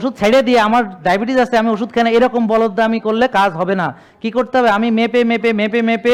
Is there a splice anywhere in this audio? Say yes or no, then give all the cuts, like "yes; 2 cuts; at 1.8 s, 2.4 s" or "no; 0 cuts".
no; 0 cuts